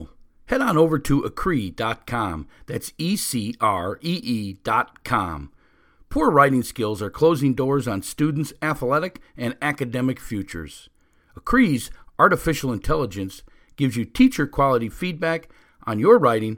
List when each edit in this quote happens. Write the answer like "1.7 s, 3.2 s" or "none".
none